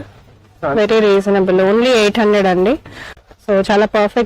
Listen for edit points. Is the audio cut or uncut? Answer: cut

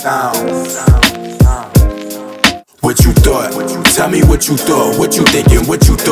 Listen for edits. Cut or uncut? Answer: uncut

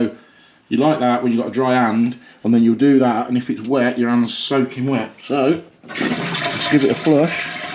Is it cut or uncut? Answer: uncut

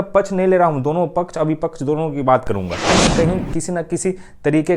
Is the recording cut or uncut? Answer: cut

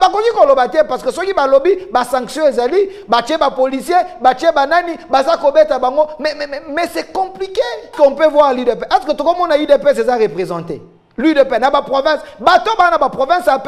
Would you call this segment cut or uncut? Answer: cut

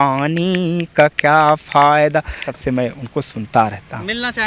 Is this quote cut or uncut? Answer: cut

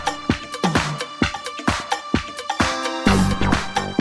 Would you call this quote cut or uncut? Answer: uncut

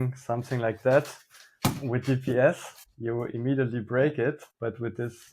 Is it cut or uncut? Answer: uncut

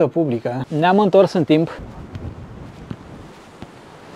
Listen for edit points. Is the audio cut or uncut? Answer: uncut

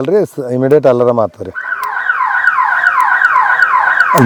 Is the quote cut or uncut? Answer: uncut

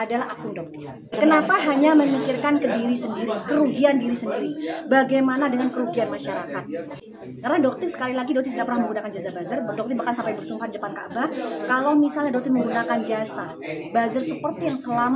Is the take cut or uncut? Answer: cut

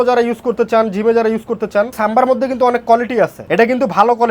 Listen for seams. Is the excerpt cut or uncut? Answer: cut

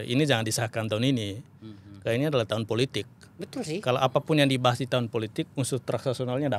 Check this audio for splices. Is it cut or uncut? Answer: uncut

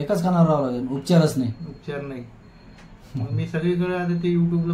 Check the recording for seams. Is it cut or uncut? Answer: uncut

